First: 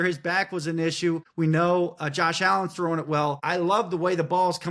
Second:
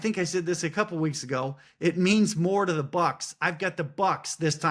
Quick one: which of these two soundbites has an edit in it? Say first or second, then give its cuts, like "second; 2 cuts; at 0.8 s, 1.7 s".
first; 2 cuts; at 1.3 s, 3.4 s